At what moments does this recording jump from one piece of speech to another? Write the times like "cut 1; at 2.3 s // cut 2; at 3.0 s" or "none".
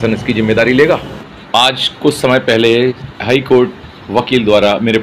cut 1; at 1.1 s // cut 2; at 3.0 s